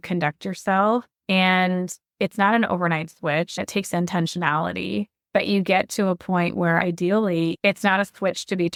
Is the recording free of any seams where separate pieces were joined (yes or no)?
yes